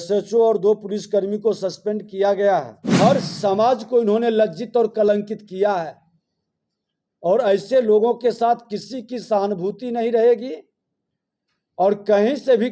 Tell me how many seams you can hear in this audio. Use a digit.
1